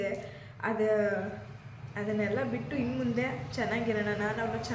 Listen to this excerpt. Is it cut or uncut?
uncut